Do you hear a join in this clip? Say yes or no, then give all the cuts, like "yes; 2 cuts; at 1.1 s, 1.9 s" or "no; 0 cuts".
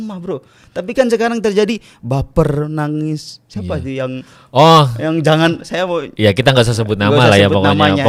no; 0 cuts